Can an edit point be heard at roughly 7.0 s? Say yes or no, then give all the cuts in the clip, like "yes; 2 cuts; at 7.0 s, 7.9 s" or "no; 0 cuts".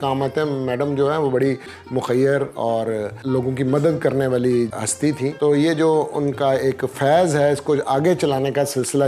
no; 2 cuts; at 3.2 s, 4.8 s